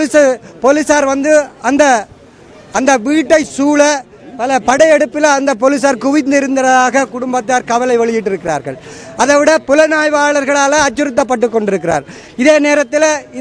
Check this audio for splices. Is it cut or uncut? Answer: uncut